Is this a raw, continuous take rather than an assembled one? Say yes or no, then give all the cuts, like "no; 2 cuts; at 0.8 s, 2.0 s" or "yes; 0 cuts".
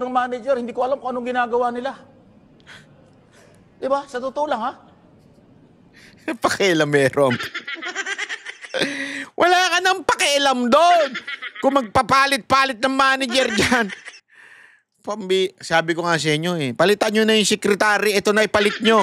yes; 0 cuts